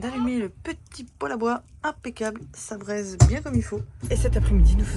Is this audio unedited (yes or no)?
no